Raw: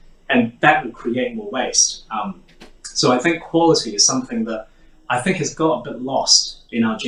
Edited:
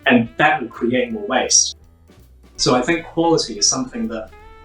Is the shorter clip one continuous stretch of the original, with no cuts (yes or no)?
no